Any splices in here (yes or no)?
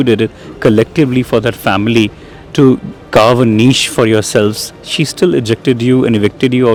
no